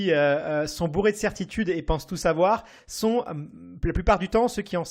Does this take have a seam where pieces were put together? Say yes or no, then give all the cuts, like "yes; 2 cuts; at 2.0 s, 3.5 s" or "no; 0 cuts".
no; 0 cuts